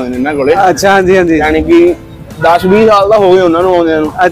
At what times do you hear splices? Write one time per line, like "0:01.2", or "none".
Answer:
none